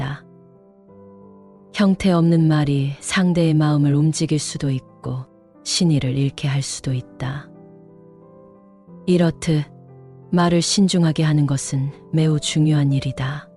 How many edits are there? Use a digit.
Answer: 2